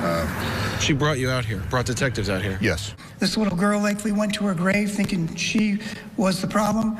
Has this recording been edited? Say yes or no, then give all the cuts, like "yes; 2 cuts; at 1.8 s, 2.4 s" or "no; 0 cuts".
yes; 1 cut; at 3.0 s